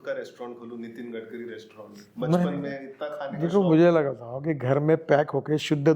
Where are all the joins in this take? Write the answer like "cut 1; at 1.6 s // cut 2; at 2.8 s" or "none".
none